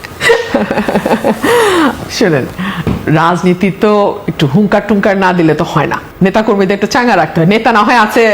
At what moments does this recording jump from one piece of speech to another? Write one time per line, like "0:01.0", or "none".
none